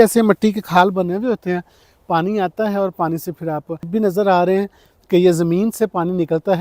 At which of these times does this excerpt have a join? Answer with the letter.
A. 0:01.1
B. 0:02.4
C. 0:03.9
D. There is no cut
C